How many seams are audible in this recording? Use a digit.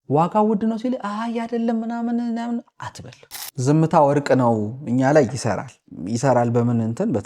1